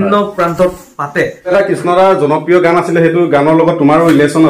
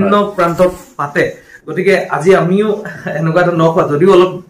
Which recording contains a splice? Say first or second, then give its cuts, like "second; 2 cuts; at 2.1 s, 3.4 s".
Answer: first; 1 cut; at 1.5 s